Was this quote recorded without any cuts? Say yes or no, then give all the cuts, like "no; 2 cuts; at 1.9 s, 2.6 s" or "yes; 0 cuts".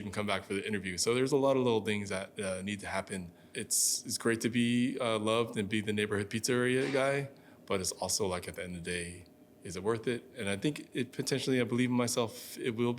no; 1 cut; at 3.4 s